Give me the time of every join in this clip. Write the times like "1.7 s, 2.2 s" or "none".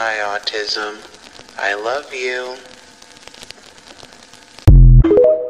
4.6 s

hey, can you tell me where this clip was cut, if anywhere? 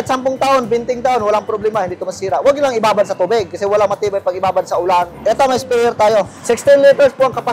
5.1 s, 6.3 s

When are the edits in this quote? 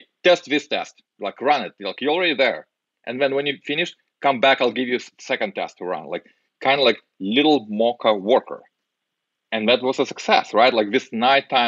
none

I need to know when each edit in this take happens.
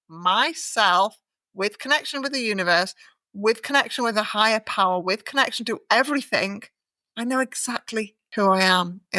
8.2 s

